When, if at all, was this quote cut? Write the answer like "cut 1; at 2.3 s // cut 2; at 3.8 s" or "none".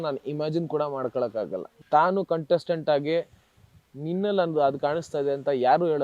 cut 1; at 1.7 s